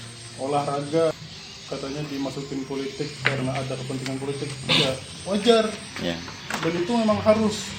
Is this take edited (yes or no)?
yes